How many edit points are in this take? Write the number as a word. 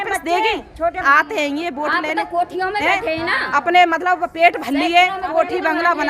one